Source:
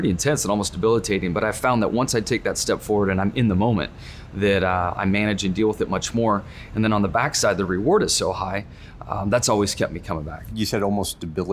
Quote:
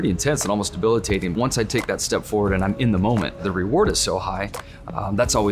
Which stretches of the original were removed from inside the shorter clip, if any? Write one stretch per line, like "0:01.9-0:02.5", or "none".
0:01.3-0:01.9
0:04.0-0:07.6

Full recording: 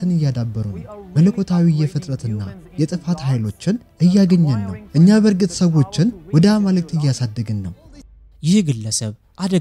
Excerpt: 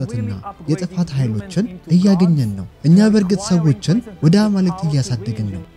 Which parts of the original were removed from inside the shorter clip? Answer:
none

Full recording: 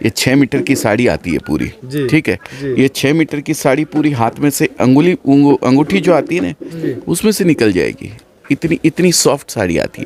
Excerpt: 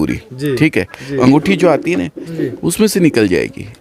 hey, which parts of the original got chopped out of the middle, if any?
0:02.7-0:05.6

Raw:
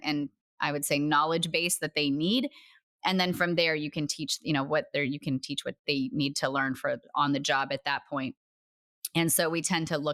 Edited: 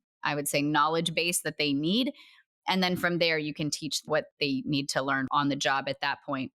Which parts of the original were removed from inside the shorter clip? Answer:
0:04.4-0:05.5
0:06.7-0:07.1

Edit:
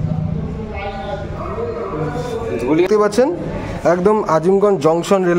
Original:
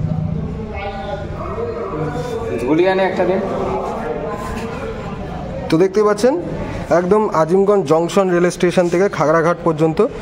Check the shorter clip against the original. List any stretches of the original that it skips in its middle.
0:02.9-0:05.9

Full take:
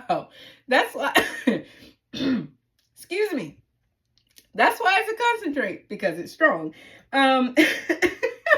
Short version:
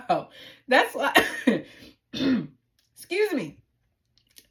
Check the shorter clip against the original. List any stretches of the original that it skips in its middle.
none

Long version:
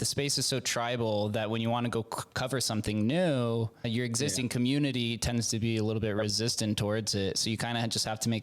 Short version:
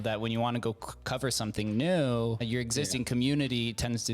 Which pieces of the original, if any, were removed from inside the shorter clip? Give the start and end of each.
0:03.7-0:03.8

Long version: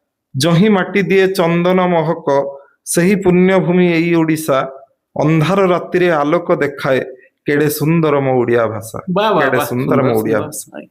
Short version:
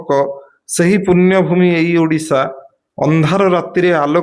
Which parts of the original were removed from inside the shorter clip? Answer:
none

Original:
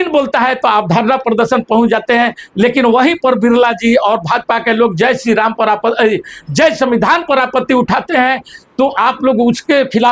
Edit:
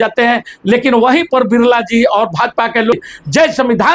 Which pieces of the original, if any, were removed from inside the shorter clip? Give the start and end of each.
0:04.9-0:06.2

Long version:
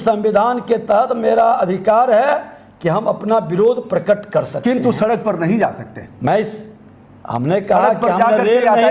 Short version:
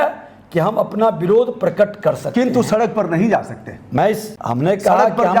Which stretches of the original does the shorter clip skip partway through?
0:06.6-0:07.2

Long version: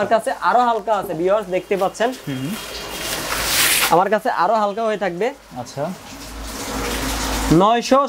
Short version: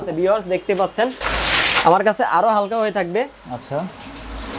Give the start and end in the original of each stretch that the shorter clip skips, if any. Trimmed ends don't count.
0:02.2-0:03.3

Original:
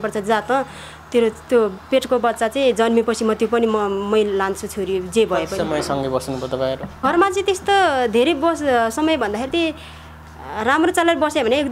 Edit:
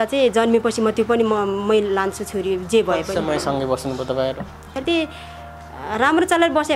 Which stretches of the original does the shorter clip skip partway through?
0:07.0-0:09.2

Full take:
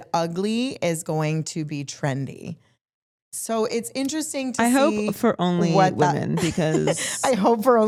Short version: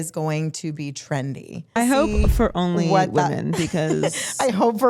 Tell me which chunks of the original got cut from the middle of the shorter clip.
0:02.6-0:04.6

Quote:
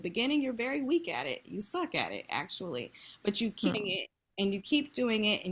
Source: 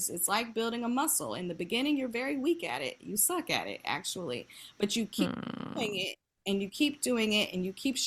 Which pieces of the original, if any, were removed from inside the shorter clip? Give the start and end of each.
0:05.3-0:05.8

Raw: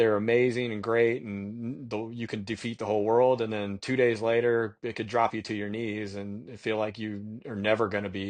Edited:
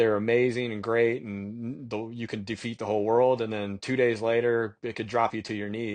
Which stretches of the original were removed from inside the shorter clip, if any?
none

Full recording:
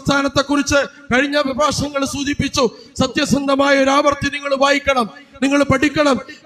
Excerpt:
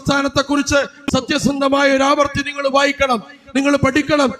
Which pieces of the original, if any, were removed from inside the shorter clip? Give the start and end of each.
0:01.0-0:02.8

